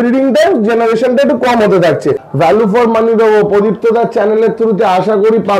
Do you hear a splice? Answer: yes; 1 cut; at 2.3 s

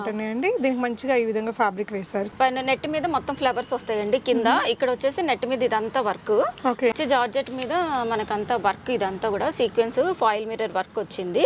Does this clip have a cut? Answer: yes; 2 cuts; at 2.3 s, 6.9 s

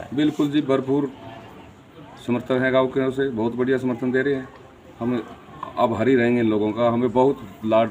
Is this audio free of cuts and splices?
yes; 0 cuts

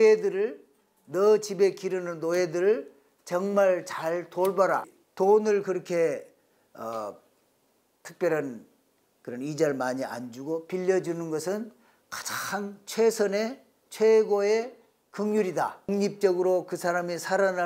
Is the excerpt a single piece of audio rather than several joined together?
no; 2 cuts; at 5.0 s, 15.9 s

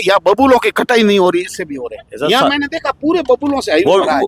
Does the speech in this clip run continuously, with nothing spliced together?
yes; 0 cuts

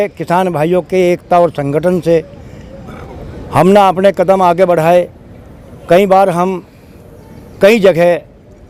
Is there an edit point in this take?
no; 0 cuts

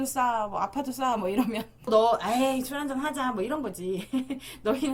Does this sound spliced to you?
yes; 1 cut; at 1.9 s

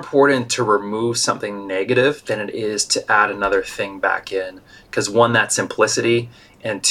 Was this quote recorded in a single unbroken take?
yes; 0 cuts

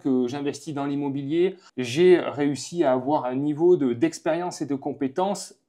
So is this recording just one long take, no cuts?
no; 1 cut; at 1.7 s

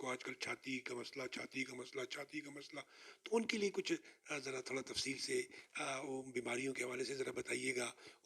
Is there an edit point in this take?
no; 0 cuts

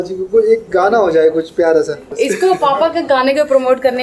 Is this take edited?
yes; 1 cut; at 2.0 s

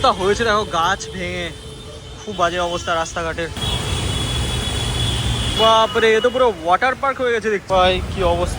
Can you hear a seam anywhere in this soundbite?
yes; 3 cuts; at 3.5 s, 5.5 s, 7.6 s

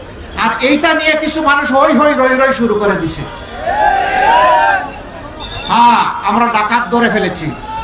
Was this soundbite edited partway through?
no; 0 cuts

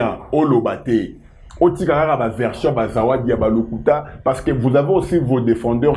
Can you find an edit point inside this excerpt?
no; 0 cuts

